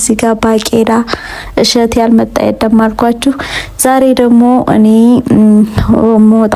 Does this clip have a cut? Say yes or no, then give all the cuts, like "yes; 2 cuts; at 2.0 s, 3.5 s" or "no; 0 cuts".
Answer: no; 0 cuts